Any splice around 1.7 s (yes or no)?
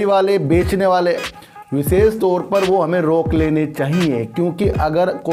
no